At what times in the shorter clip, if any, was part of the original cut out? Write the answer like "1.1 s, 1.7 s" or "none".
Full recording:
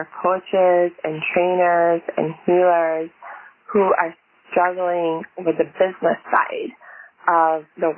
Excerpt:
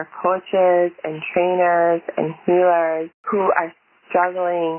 3.2 s